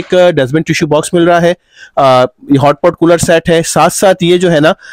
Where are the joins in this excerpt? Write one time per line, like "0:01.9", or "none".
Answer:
none